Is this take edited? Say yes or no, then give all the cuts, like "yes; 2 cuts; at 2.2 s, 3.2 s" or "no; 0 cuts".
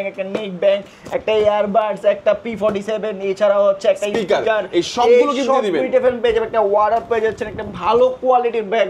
no; 0 cuts